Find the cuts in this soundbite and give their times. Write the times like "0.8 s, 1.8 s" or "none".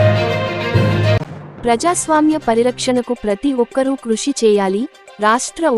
1.2 s